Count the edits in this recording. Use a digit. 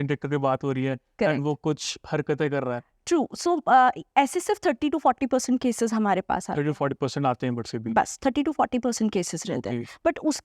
0